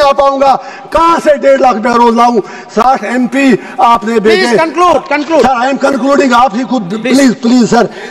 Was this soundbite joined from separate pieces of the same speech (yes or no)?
no